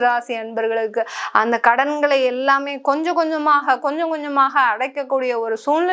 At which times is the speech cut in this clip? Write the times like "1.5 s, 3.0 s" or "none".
none